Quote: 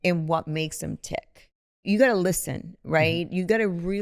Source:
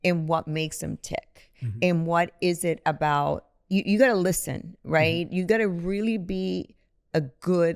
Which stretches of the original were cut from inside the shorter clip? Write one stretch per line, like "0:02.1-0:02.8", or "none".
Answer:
0:01.8-0:03.8